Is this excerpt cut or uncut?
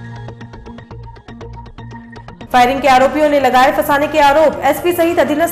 cut